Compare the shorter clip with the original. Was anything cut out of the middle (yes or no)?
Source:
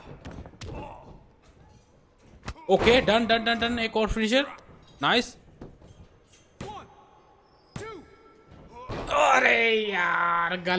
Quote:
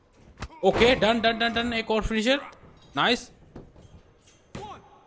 no